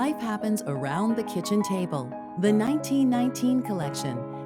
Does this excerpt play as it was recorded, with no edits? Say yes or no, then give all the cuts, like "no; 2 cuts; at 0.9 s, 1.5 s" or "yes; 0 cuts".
yes; 0 cuts